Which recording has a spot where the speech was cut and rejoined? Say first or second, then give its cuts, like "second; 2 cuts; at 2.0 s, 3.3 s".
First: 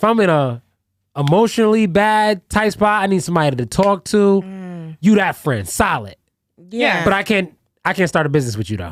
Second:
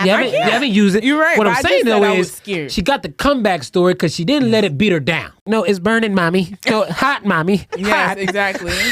second; 1 cut; at 5.4 s